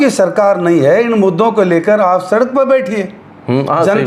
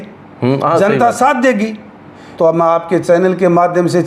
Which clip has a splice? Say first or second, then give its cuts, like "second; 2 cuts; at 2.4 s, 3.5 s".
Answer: second; 1 cut; at 2.2 s